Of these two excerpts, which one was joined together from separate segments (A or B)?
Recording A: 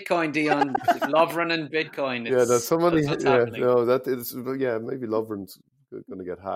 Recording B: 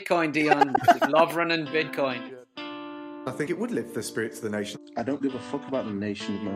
B